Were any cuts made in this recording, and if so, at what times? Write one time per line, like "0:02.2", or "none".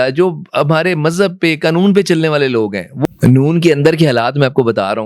0:02.9